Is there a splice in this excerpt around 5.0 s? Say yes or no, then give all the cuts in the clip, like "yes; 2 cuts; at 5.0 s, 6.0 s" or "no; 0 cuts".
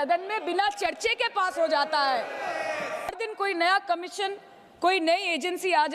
no; 1 cut; at 3.1 s